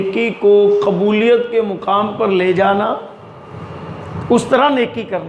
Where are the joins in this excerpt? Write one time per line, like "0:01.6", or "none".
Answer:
none